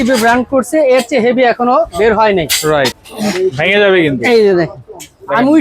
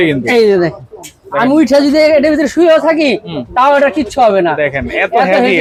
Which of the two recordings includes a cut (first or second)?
first